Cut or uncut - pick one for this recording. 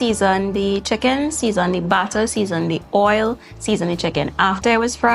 uncut